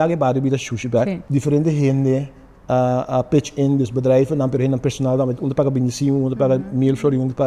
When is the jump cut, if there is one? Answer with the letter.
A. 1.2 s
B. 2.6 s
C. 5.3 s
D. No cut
A